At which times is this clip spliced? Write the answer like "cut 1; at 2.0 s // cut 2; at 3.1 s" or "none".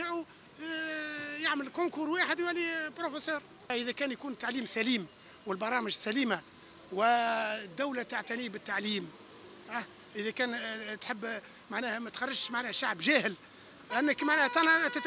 cut 1; at 3.7 s